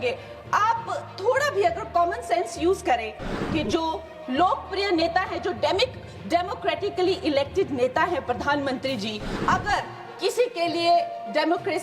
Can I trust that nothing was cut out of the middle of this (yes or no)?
no